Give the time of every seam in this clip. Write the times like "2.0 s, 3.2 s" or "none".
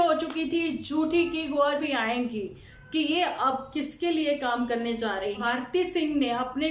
1.8 s, 5.4 s